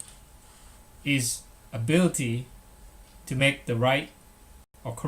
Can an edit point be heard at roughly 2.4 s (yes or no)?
yes